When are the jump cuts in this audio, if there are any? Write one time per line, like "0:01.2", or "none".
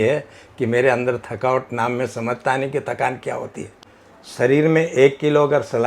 0:03.7